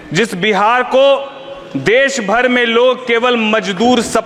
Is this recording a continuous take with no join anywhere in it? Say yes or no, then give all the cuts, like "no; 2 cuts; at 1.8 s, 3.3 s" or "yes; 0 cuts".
yes; 0 cuts